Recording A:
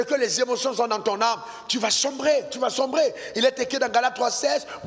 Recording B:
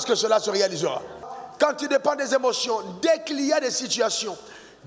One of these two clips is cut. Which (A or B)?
B